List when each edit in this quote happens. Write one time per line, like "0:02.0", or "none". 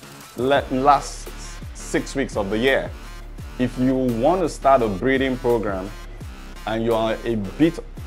none

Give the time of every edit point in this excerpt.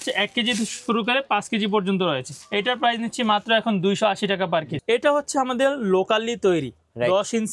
0:02.4
0:04.7

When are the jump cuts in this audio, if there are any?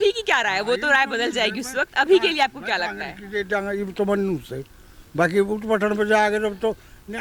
none

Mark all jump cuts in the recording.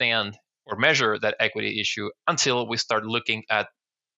none

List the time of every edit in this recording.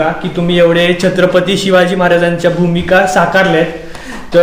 none

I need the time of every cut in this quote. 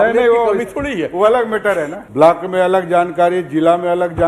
0:02.0

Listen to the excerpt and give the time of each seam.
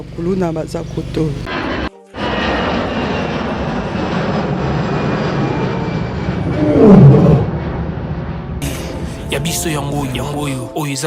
0:01.4

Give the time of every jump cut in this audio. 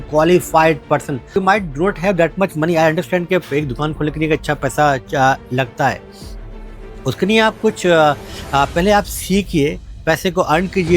0:01.3

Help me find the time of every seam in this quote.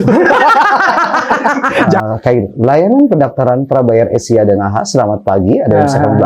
0:02.0

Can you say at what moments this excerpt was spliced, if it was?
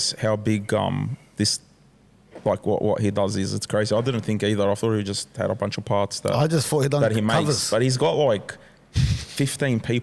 none

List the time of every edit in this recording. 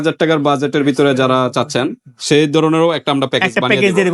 none

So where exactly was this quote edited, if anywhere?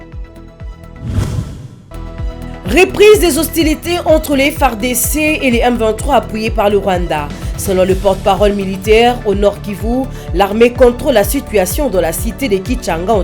0:01.0

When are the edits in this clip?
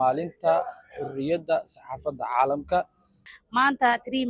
0:03.3

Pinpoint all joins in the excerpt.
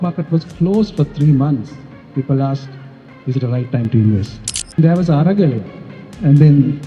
0:04.8

